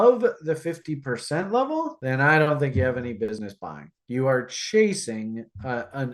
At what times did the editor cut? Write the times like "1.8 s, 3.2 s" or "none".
3.4 s